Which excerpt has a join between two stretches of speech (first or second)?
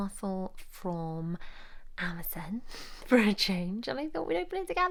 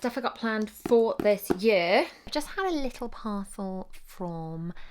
second